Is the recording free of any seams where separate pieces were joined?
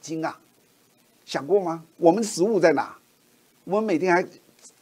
no; 1 cut; at 1.9 s

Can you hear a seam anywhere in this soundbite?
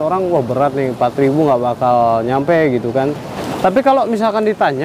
yes; 1 cut; at 3.3 s

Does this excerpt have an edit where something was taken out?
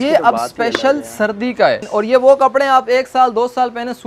yes; 1 cut; at 1.9 s

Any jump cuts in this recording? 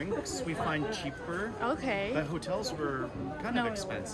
no; 0 cuts

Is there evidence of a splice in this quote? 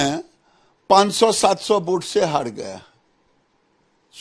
no; 0 cuts

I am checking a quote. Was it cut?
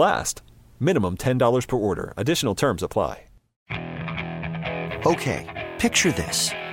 yes; 1 cut; at 3.6 s

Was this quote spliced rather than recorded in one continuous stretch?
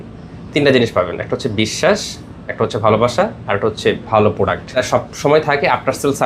yes; 1 cut; at 4.8 s

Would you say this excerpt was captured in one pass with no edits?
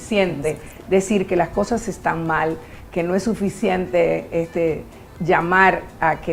yes; 0 cuts

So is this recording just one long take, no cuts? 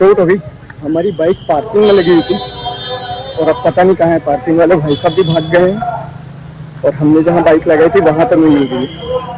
yes; 0 cuts

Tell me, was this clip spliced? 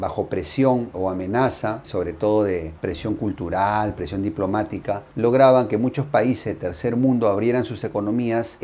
no; 0 cuts

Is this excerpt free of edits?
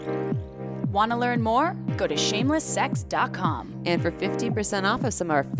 no; 1 cut; at 0.9 s

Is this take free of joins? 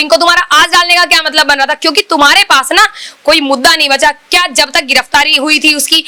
yes; 0 cuts

